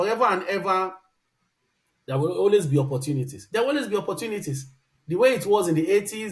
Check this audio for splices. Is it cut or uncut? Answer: uncut